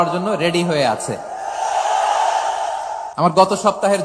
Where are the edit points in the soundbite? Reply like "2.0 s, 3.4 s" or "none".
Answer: 3.0 s